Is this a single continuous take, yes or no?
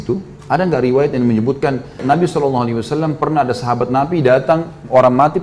no